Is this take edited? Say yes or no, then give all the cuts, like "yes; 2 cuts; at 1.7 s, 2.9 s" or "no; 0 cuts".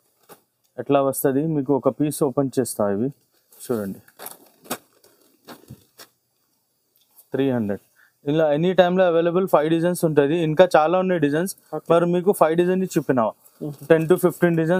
no; 0 cuts